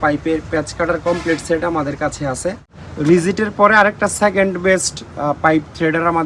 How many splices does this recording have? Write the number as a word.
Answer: one